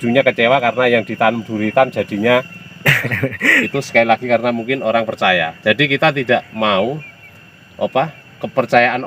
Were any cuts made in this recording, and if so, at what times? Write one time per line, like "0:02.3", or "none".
0:03.7